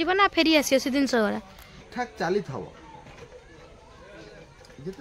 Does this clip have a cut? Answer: yes; 1 cut; at 1.9 s

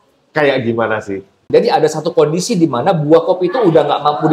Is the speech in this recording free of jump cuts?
no; 1 cut; at 1.4 s

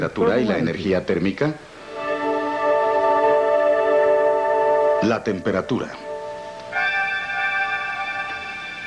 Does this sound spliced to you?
yes; 1 cut; at 7.1 s

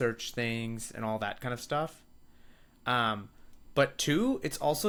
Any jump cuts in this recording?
no; 0 cuts

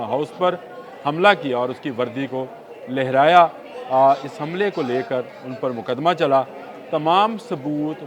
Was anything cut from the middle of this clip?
no; 0 cuts

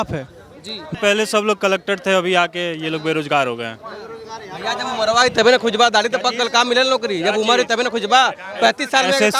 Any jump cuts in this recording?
yes; 1 cut; at 1.0 s

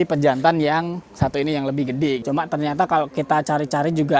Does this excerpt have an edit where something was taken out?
yes; 1 cut; at 2.2 s

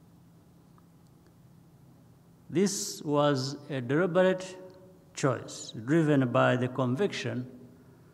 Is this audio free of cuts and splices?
yes; 0 cuts

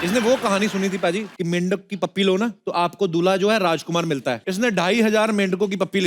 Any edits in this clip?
yes; 3 cuts; at 1.3 s, 2.6 s, 4.5 s

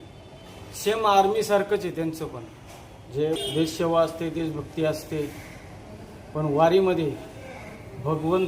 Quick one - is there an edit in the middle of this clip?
yes; 1 cut; at 3.4 s

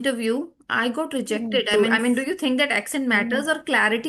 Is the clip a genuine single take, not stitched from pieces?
no; 1 cut; at 1.7 s

